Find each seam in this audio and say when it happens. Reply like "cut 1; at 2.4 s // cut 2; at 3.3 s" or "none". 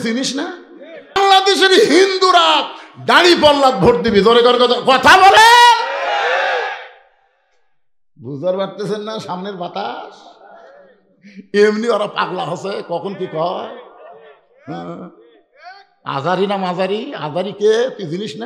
cut 1; at 1.2 s